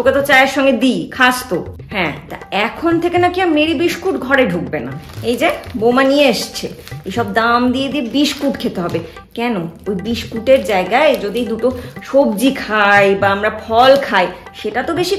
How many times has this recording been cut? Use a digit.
1